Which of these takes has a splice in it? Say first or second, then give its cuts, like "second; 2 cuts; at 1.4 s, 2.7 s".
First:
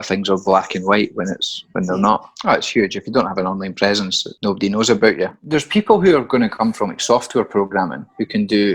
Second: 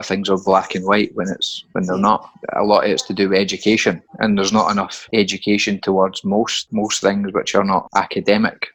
first; 2 cuts; at 2.3 s, 5.4 s